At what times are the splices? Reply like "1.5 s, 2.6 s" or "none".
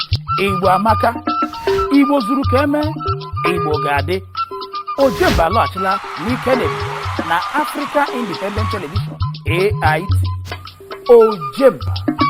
10.5 s